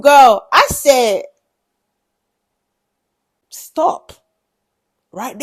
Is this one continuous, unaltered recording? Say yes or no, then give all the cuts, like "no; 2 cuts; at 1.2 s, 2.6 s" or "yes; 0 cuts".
yes; 0 cuts